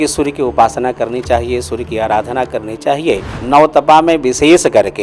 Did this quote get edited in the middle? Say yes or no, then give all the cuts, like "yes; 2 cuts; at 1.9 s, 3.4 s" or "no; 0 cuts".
yes; 1 cut; at 3.3 s